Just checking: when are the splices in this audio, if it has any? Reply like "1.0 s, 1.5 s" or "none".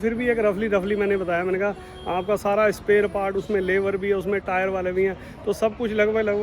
none